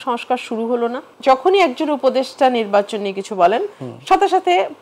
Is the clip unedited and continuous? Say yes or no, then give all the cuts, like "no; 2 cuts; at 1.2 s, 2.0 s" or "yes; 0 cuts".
no; 1 cut; at 1.1 s